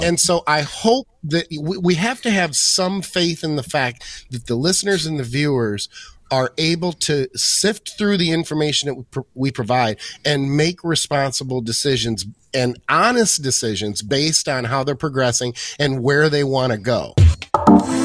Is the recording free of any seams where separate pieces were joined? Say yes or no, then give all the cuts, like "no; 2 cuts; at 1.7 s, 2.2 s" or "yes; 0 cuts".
no; 1 cut; at 17.1 s